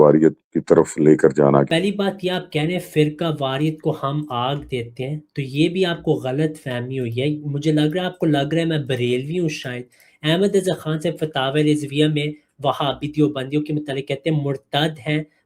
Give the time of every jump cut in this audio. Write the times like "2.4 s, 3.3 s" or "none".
1.7 s